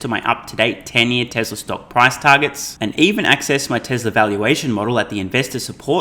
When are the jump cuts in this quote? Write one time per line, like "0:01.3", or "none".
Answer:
none